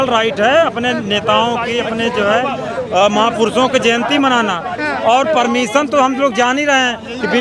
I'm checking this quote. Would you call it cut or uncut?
uncut